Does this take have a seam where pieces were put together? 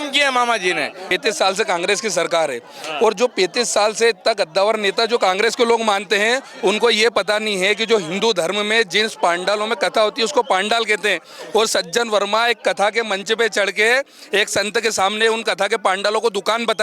yes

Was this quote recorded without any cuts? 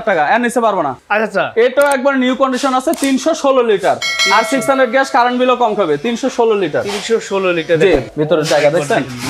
no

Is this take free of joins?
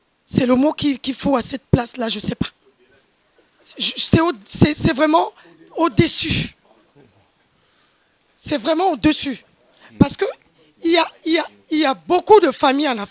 yes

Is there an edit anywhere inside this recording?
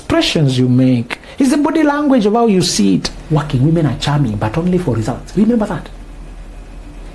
yes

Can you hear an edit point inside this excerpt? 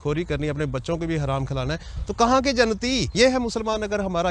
yes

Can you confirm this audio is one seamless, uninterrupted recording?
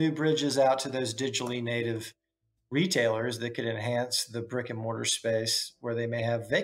yes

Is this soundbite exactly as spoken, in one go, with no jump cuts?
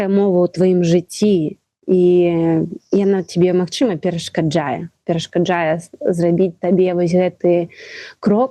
no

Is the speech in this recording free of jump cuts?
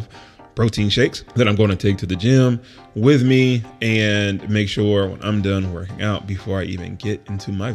no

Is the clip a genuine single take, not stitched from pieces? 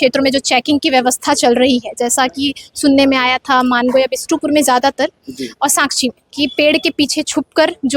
no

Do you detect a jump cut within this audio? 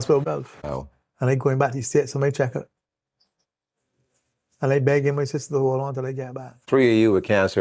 yes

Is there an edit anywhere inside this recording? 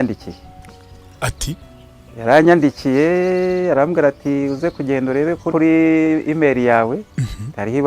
yes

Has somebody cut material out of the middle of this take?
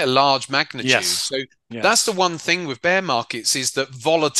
no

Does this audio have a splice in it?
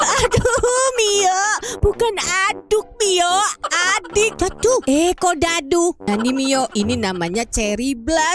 yes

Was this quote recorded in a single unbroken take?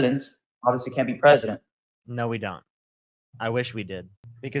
yes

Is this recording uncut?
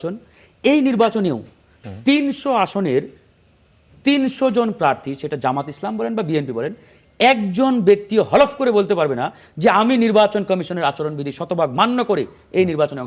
yes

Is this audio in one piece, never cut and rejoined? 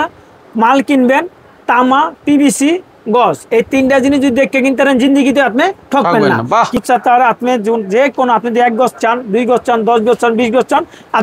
no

